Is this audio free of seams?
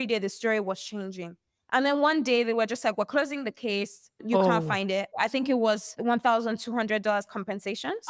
no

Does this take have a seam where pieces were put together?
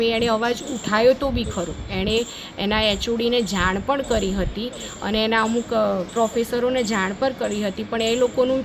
no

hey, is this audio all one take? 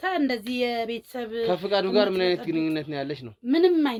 yes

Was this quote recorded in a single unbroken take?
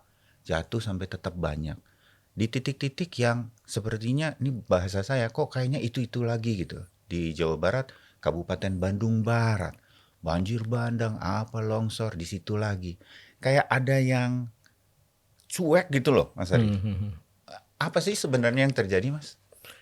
yes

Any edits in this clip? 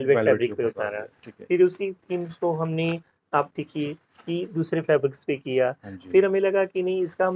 no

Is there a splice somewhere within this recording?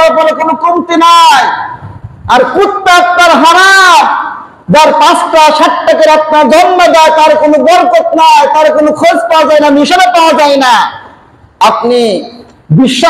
no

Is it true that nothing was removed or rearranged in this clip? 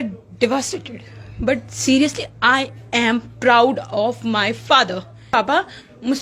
no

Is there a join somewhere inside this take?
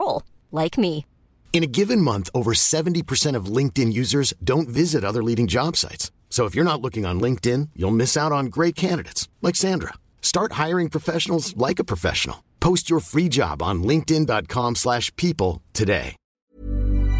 yes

